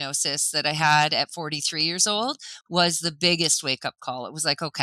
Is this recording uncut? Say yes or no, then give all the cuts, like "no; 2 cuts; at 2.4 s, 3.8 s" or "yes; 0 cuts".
yes; 0 cuts